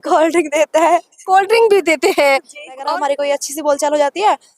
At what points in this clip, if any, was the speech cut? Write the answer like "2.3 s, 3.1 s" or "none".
2.8 s